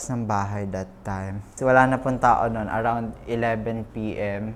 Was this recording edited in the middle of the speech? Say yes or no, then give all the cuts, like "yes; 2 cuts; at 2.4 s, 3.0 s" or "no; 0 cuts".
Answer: yes; 1 cut; at 1.5 s